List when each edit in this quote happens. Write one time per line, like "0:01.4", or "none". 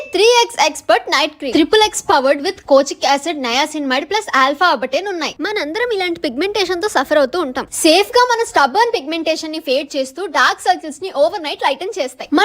0:05.3
0:07.6